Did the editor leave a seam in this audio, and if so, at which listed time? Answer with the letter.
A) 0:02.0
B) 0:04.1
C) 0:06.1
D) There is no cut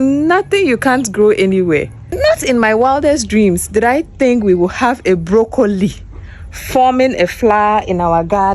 A